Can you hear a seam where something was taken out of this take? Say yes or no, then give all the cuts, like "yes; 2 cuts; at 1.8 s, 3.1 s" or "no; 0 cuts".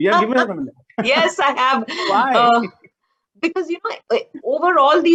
no; 0 cuts